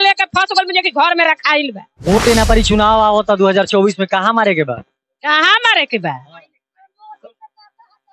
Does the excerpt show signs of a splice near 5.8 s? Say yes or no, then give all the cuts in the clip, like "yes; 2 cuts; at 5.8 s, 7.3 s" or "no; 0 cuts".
no; 1 cut; at 1.9 s